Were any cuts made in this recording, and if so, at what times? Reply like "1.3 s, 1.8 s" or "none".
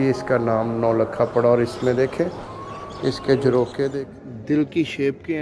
4.0 s